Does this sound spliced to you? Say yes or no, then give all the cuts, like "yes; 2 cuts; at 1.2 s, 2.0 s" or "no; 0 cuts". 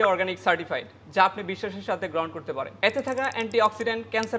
yes; 1 cut; at 2.7 s